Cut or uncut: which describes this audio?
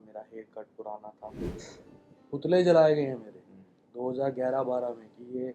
cut